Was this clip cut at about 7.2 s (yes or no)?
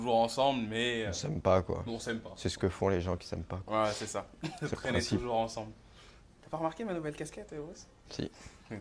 yes